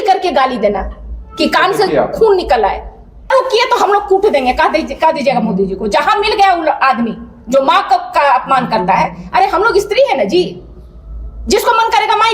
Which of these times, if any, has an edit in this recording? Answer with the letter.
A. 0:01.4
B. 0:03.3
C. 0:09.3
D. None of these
B